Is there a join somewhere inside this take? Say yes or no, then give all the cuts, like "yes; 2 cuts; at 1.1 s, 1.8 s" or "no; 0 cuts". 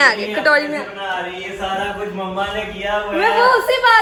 no; 0 cuts